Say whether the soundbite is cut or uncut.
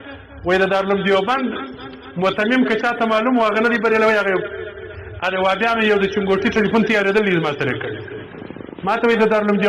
uncut